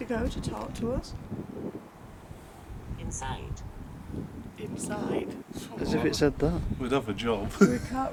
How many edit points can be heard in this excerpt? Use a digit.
0